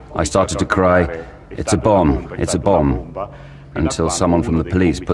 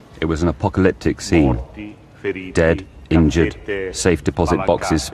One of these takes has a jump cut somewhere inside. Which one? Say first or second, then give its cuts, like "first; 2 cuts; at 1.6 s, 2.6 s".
second; 1 cut; at 1.0 s